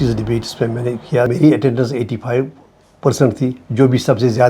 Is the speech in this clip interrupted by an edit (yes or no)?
yes